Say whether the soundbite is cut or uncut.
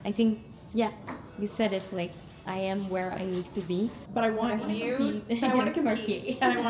cut